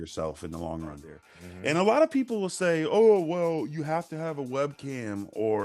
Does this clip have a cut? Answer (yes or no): yes